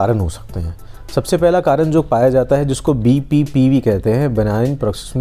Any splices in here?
no; 0 cuts

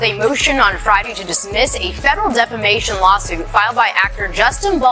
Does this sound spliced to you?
no; 0 cuts

